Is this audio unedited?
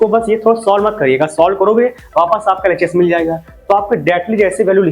yes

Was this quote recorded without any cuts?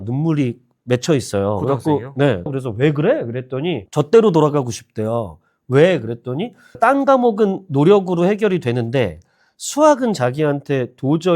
no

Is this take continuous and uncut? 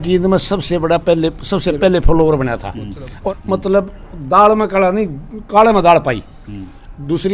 no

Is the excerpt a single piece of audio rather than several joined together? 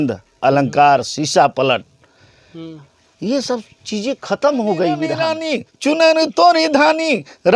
no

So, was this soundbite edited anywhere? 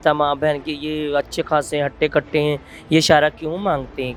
no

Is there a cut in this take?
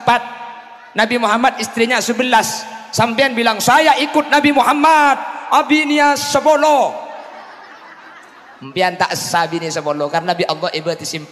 no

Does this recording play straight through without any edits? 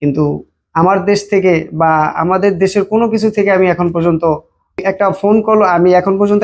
yes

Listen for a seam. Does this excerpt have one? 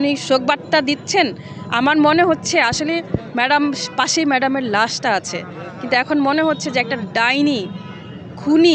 no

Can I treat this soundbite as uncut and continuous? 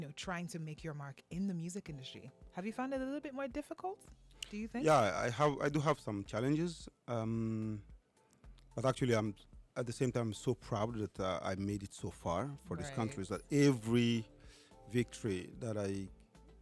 yes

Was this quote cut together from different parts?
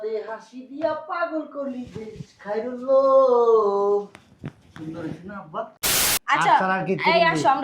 yes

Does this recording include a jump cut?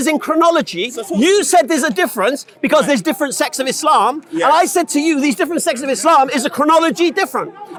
no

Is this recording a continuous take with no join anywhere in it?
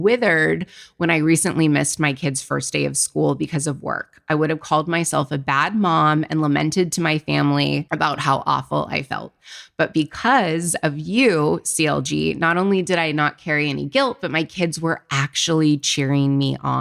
yes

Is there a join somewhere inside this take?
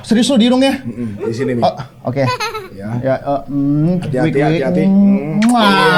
no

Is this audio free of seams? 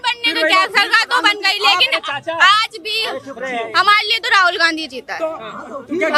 yes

